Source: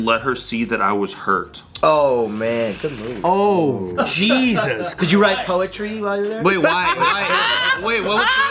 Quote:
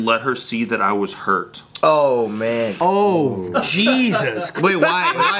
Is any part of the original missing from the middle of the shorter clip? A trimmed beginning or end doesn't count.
yes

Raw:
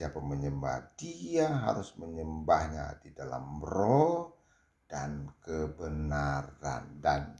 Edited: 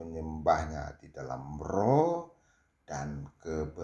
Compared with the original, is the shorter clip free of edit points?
yes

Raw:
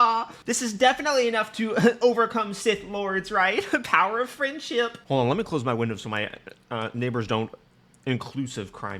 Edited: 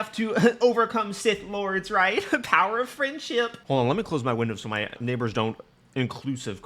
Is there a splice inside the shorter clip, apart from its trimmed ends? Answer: yes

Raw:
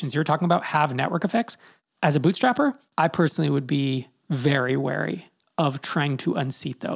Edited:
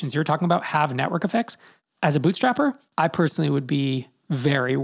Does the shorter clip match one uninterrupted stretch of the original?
yes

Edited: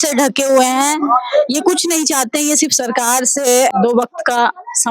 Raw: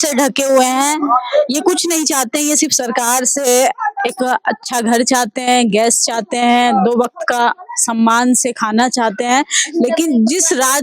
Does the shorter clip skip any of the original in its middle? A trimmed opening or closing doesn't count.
yes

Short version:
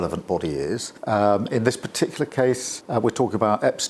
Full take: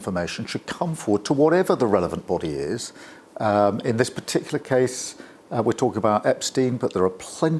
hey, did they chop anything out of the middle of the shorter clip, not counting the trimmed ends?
yes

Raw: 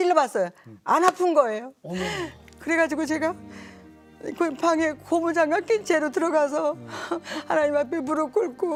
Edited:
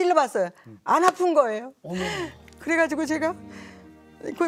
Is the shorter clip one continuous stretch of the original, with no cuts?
yes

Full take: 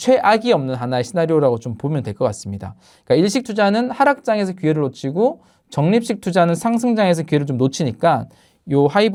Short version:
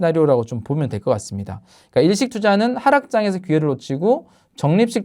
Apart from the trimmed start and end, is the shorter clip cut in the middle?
no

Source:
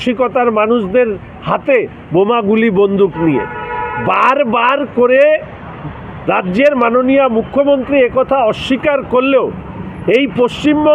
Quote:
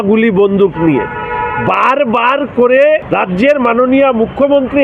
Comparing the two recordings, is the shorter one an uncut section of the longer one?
no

